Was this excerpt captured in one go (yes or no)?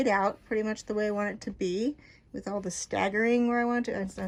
yes